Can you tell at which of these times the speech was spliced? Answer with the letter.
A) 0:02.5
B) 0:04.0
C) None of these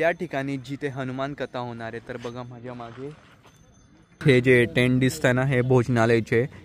B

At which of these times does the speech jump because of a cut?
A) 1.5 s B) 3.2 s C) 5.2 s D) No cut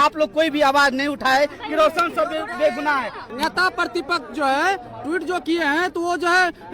B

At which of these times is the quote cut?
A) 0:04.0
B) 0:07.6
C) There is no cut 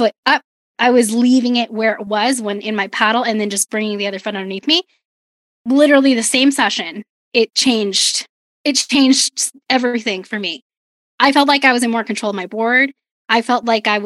B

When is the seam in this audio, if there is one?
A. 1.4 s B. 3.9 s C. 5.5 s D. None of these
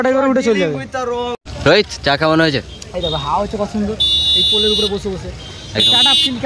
A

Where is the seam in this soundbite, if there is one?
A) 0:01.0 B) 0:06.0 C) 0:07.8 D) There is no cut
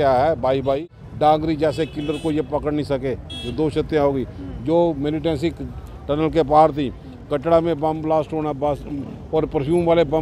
A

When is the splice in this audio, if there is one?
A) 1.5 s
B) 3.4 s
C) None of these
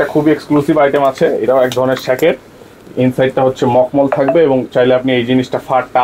C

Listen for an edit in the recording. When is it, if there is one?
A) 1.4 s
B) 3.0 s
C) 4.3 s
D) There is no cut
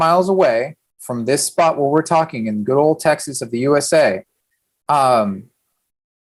D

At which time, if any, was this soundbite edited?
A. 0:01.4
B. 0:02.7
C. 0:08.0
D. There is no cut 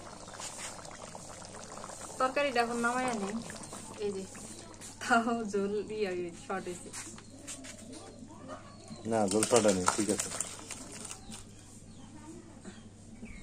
D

